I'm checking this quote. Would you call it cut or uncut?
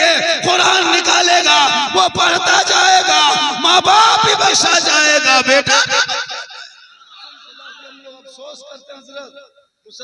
cut